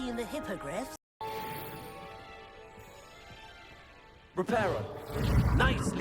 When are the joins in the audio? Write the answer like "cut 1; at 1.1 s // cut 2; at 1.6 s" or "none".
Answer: cut 1; at 1.2 s